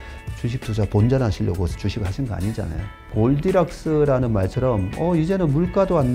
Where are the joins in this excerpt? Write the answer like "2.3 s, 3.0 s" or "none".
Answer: 3.0 s